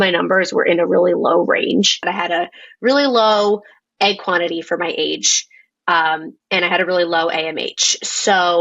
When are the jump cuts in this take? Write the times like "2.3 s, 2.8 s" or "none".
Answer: 2.0 s